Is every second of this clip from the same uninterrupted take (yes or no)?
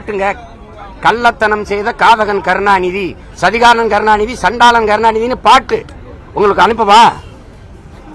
yes